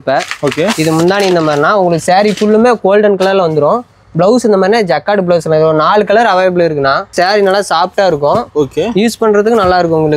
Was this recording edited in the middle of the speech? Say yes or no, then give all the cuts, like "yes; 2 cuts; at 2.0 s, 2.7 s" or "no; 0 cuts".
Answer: yes; 1 cut; at 7.1 s